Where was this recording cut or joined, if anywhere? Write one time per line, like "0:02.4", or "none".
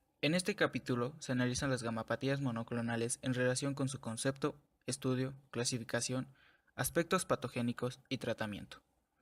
none